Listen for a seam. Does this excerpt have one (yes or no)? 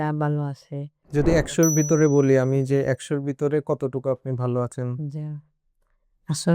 yes